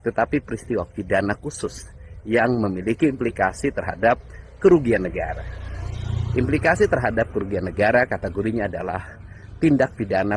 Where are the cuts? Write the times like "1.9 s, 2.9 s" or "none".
none